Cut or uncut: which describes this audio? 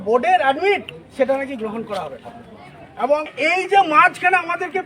cut